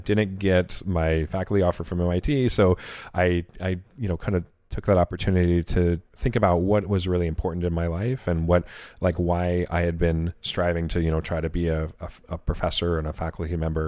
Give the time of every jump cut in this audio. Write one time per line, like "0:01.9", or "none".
0:06.1